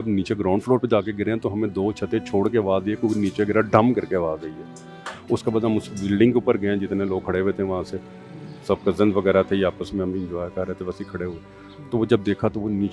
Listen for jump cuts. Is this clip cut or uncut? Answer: uncut